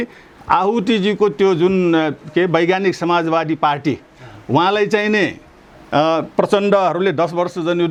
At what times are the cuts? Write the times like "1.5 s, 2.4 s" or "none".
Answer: none